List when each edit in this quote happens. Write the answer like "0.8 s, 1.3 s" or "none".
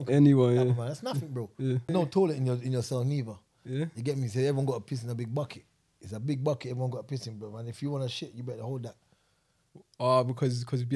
1.9 s